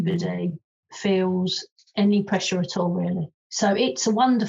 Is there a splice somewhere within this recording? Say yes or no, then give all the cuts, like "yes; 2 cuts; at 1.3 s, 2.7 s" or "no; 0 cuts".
yes; 1 cut; at 3.3 s